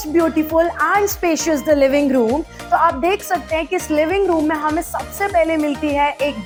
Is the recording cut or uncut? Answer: uncut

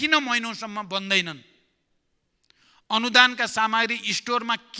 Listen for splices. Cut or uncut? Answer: uncut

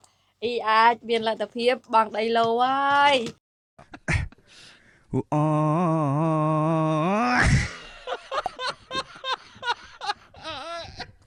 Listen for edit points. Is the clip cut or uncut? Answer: uncut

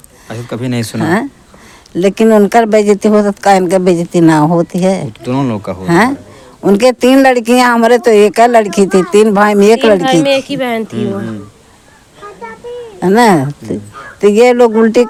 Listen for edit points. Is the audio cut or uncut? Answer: uncut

